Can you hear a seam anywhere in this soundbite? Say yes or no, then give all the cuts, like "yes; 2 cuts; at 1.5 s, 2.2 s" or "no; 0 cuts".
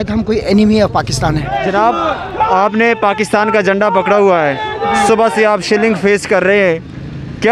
yes; 1 cut; at 1.6 s